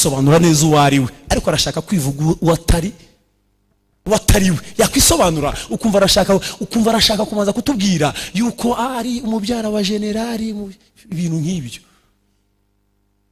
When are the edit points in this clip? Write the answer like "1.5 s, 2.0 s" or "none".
none

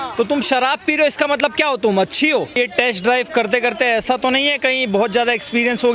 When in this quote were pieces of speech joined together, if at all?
2.6 s

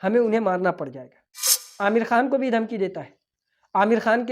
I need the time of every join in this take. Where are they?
1.6 s

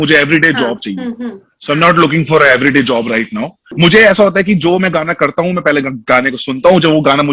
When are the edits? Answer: 3.6 s

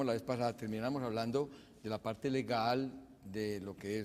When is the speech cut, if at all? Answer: 2.5 s

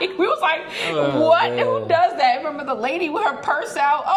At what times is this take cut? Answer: none

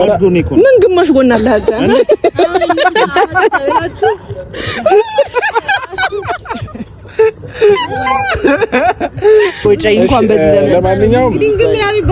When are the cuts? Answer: 9.6 s

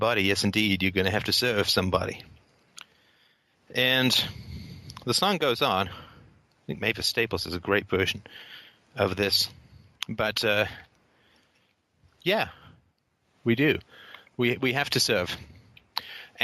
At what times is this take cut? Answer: 1.7 s

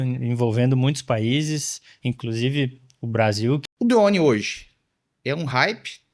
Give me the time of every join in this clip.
3.6 s

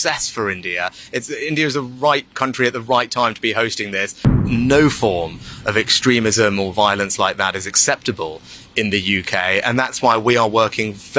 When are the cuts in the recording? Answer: 4.4 s

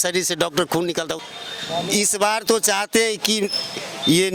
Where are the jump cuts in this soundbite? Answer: 1.2 s

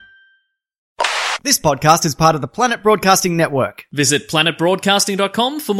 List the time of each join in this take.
1.1 s

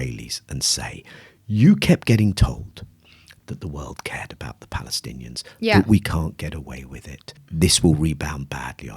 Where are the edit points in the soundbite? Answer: 7.4 s

